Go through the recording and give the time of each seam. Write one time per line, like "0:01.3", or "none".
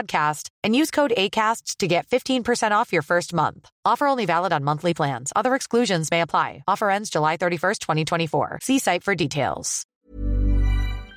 0:09.9